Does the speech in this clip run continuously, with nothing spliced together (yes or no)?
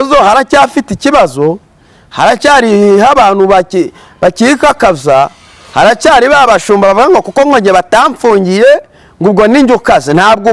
yes